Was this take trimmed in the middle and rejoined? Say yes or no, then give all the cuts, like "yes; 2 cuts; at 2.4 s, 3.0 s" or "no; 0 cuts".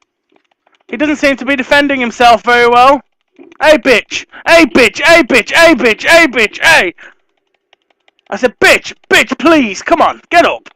no; 0 cuts